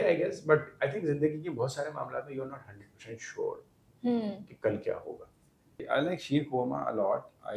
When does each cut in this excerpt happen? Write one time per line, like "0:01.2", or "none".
0:05.8